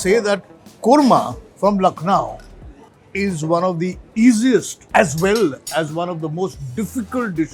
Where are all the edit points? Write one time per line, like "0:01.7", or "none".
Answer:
0:01.4
0:04.8